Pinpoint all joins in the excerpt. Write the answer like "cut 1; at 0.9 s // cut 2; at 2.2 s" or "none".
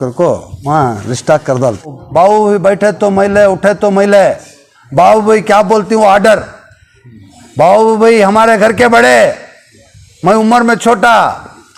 cut 1; at 2.0 s